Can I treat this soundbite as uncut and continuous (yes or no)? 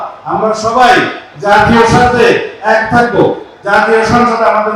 yes